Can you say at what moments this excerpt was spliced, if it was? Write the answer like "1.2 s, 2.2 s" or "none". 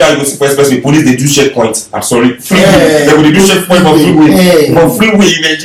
none